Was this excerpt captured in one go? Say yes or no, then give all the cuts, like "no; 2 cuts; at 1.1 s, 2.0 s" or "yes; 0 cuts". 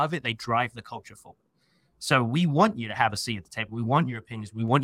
yes; 0 cuts